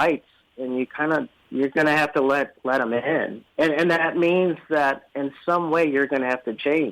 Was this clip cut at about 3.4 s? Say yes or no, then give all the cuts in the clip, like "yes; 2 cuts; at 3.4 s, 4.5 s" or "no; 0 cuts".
yes; 2 cuts; at 1.4 s, 3.4 s